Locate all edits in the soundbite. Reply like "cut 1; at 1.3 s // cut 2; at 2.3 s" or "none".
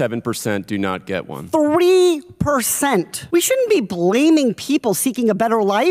cut 1; at 3.2 s

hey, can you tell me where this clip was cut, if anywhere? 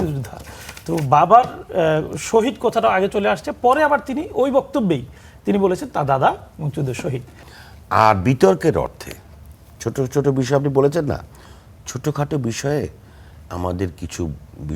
cut 1; at 7.4 s

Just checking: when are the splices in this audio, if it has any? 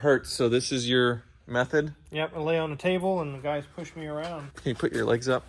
cut 1; at 4.5 s

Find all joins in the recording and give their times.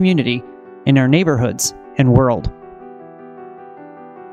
cut 1; at 2.5 s

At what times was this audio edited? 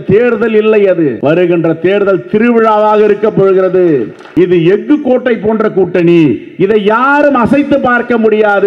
cut 1; at 1.2 s // cut 2; at 4.2 s

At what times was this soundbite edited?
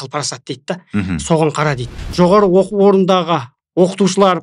cut 1; at 2.0 s

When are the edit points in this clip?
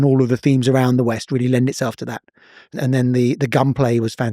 cut 1; at 2.7 s

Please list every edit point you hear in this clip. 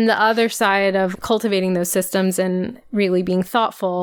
cut 1; at 1.1 s // cut 2; at 2.8 s

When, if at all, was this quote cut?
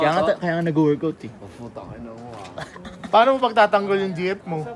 none

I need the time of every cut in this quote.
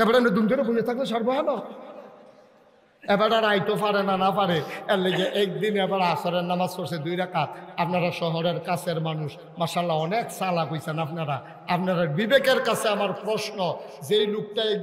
none

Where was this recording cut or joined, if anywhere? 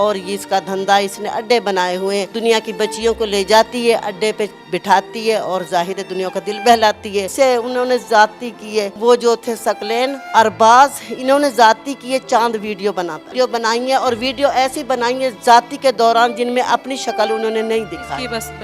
cut 1; at 2.3 s // cut 2; at 7.3 s // cut 3; at 13.2 s

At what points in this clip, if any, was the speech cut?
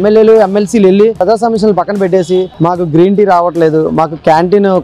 cut 1; at 1.2 s

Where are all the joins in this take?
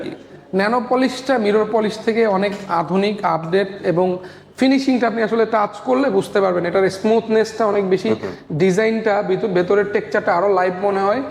none

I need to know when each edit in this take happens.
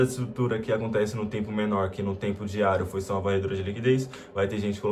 none

